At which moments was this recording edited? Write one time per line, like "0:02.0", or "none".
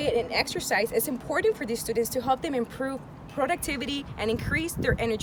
none